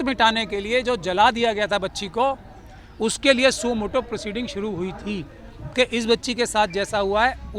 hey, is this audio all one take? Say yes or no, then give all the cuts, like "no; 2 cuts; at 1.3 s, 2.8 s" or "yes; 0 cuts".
yes; 0 cuts